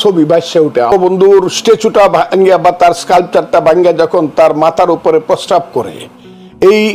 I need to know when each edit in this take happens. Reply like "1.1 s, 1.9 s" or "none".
0.9 s